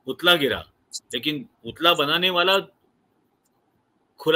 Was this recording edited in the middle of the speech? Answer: no; 0 cuts

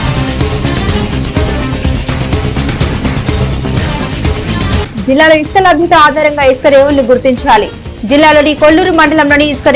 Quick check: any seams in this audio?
yes; 1 cut; at 4.1 s

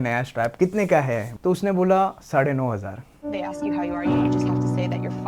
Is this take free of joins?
yes; 0 cuts

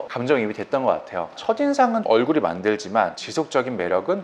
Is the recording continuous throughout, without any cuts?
no; 1 cut; at 1.4 s

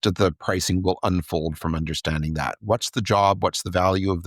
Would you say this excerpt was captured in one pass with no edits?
yes; 0 cuts

